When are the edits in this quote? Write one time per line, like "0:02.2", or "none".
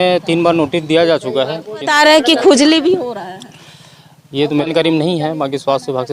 0:01.9
0:04.7